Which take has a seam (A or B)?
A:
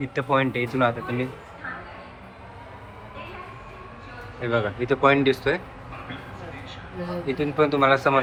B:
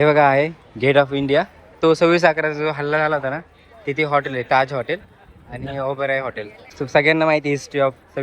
B